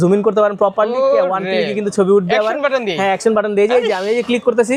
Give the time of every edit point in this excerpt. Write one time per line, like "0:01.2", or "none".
none